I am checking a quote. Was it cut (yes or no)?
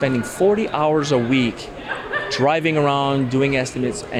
no